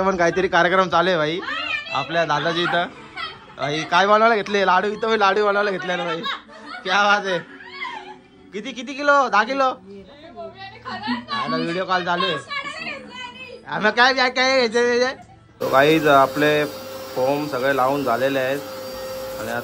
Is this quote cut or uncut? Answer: cut